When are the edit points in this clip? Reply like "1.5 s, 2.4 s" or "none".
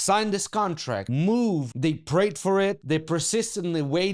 1.1 s, 1.7 s, 2.8 s